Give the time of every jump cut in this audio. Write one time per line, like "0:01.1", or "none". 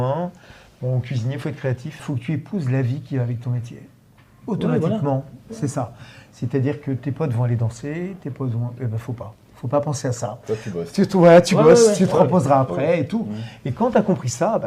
0:02.0